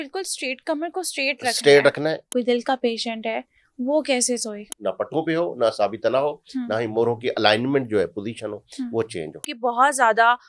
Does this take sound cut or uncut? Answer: cut